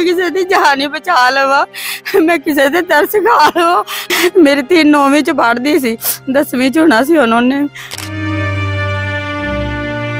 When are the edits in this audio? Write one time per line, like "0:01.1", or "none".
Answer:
0:04.0
0:07.8